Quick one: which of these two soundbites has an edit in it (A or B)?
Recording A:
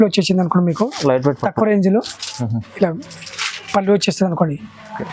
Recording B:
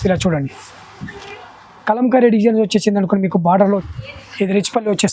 B